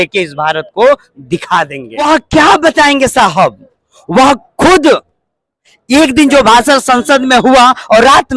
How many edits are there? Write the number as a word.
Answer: one